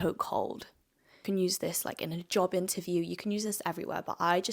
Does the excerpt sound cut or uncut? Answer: cut